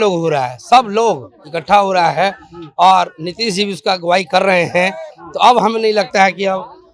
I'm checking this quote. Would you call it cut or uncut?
uncut